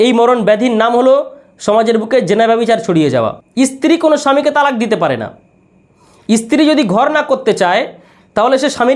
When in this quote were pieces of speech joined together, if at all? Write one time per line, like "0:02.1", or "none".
0:03.4

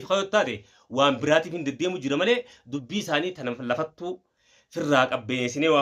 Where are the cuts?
none

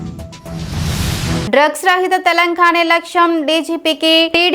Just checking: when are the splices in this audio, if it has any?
0:01.5

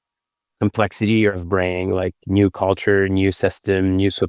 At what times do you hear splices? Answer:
0:01.4

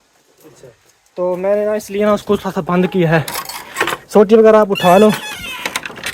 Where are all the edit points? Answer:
none

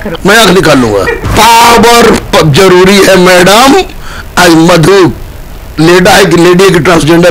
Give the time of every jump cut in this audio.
0:01.2

